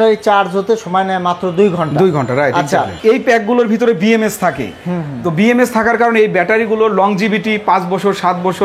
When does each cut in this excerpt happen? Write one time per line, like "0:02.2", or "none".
0:02.9